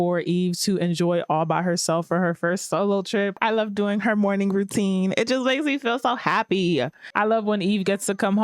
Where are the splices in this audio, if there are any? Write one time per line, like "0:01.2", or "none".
0:03.3
0:07.0